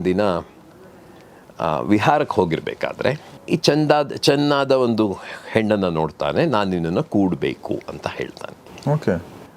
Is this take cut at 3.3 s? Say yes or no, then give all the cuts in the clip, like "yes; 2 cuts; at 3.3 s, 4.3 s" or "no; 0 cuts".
yes; 1 cut; at 3.3 s